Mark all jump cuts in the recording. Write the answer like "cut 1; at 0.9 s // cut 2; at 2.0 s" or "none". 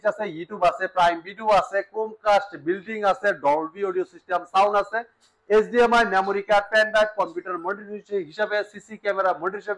none